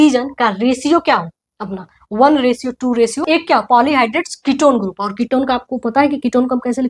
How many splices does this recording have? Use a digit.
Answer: 1